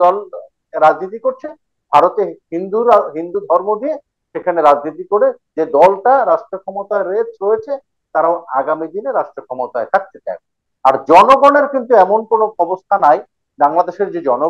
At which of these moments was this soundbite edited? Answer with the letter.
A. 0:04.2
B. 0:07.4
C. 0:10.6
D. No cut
C